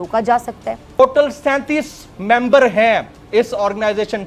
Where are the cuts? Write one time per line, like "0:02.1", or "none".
0:01.0